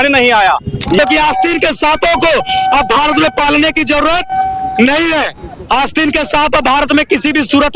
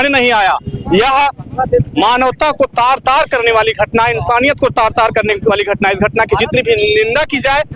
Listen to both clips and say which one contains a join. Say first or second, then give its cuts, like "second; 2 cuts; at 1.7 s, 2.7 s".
first; 1 cut; at 1.0 s